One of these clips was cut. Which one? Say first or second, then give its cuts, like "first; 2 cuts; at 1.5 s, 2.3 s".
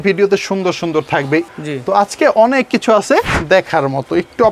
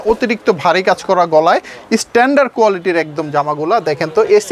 first; 2 cuts; at 1.5 s, 3.4 s